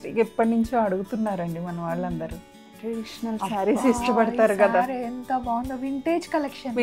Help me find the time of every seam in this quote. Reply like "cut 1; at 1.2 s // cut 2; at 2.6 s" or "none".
cut 1; at 2.8 s